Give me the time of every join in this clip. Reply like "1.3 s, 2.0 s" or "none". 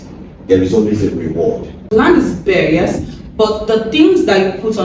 1.8 s